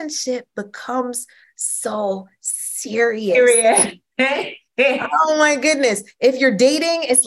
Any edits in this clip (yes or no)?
no